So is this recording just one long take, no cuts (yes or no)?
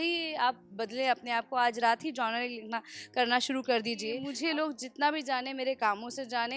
no